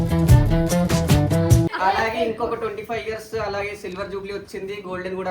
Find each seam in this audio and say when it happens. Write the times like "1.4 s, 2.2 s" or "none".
1.7 s